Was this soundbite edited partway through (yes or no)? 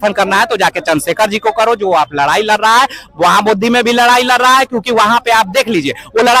no